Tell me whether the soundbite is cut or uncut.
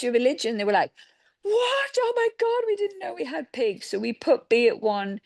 uncut